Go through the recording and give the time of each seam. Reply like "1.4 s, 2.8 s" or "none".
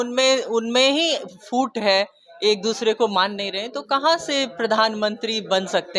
none